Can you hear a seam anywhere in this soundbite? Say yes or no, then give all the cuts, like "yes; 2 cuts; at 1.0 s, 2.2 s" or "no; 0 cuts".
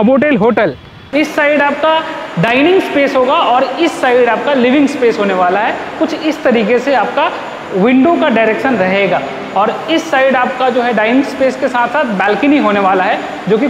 yes; 1 cut; at 1.0 s